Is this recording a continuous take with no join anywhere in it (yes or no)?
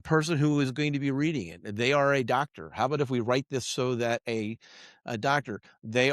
yes